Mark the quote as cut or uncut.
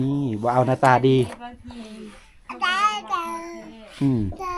uncut